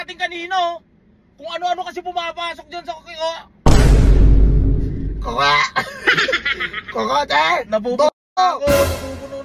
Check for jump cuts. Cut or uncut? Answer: uncut